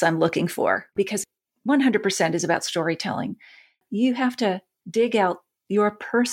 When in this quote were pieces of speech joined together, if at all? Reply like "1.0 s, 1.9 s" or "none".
0.9 s, 3.8 s, 4.7 s